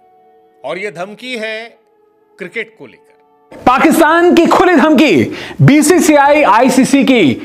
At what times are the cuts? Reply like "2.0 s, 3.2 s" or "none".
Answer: 3.6 s